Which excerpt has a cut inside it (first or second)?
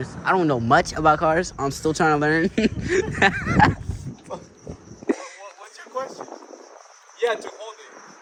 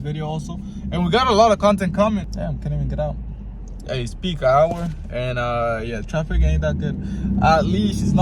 second